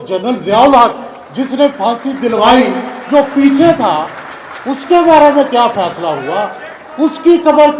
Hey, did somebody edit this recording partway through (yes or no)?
no